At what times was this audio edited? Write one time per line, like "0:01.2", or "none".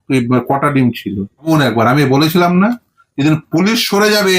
0:01.5